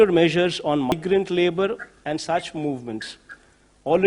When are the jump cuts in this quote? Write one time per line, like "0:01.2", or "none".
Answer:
0:00.9